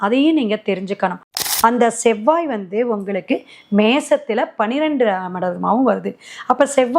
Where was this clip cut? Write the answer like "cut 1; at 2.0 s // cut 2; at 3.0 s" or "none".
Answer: cut 1; at 1.4 s